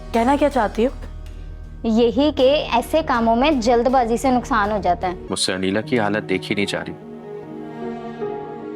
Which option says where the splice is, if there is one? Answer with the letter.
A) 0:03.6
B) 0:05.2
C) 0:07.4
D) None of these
B